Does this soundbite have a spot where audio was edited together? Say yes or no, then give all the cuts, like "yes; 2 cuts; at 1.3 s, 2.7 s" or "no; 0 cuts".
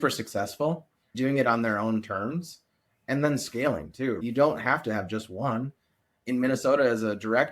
yes; 2 cuts; at 1.1 s, 4.2 s